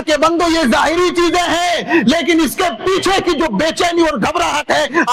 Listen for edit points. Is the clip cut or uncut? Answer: uncut